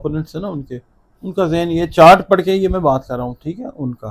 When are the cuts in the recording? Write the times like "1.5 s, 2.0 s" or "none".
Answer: none